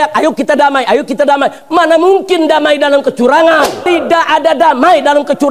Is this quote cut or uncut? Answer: cut